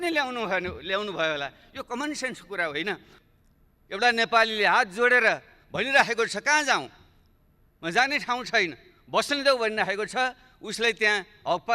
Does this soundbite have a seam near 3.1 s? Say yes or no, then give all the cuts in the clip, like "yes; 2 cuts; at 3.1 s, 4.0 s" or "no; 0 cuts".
yes; 1 cut; at 3.1 s